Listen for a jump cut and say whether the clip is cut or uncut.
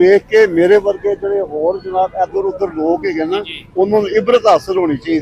uncut